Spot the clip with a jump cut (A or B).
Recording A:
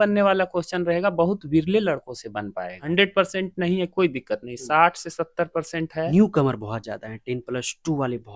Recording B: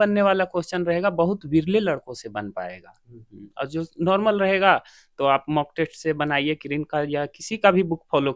A